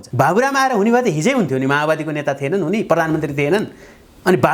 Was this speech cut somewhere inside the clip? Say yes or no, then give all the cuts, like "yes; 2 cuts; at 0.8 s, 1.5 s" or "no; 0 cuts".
no; 0 cuts